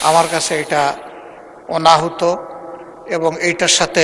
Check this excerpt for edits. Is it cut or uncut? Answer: uncut